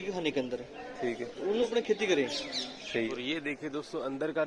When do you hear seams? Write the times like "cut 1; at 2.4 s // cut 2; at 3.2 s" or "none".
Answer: cut 1; at 1.7 s // cut 2; at 3.1 s